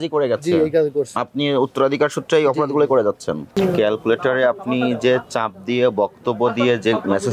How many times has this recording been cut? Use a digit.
1